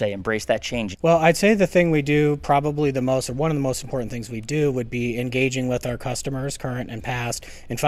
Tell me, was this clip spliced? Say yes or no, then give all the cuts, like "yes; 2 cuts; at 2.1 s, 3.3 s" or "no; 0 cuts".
yes; 1 cut; at 0.9 s